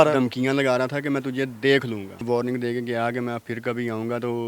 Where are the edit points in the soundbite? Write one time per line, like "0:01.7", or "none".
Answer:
0:02.2